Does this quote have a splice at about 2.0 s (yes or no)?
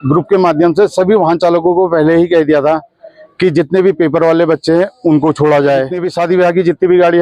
no